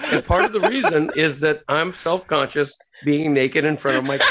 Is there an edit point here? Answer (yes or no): no